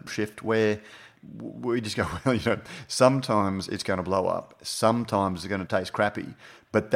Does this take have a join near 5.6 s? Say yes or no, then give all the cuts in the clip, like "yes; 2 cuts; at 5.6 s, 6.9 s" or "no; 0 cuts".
yes; 1 cut; at 5.6 s